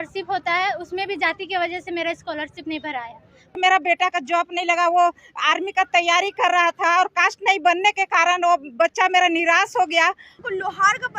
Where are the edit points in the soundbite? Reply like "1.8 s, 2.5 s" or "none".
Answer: 3.6 s, 10.3 s